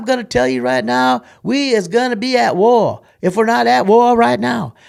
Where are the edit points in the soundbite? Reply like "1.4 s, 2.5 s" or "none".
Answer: none